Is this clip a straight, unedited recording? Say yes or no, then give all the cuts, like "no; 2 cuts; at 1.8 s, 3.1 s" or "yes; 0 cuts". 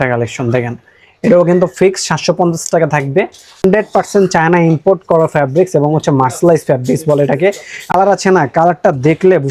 no; 2 cuts; at 3.6 s, 7.9 s